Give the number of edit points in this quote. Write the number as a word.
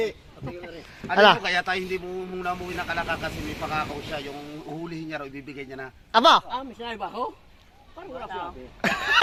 zero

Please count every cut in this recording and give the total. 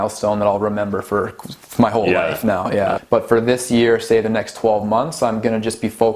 one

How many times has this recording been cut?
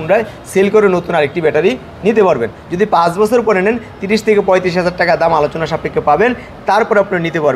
zero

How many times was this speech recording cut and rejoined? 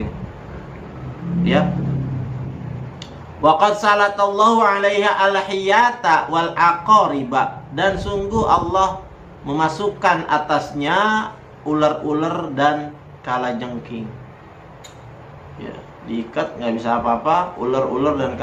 zero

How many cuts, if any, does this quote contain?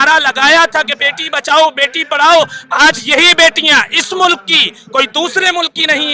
zero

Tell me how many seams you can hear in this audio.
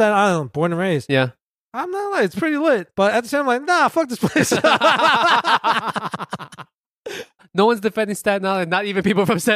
one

